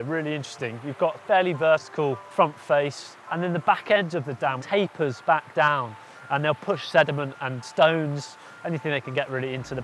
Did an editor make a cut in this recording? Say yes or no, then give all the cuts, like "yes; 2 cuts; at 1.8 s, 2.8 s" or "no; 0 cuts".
yes; 3 cuts; at 2.2 s, 4.6 s, 7.6 s